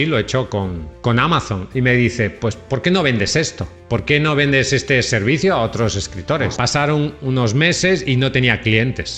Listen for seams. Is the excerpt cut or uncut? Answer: cut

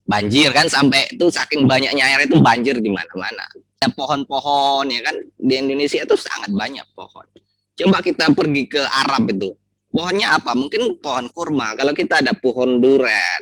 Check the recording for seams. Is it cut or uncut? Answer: cut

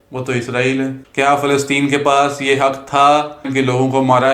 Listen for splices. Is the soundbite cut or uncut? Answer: cut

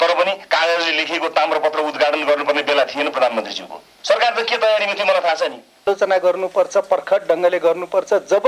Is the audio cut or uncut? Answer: cut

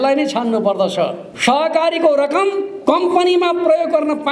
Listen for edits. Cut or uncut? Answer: cut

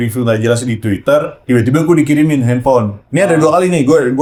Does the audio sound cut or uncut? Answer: uncut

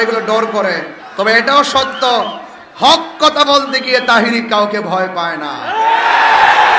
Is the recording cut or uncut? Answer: cut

